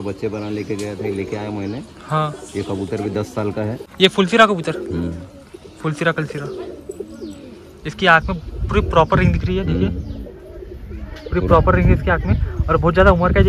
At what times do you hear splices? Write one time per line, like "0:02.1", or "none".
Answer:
none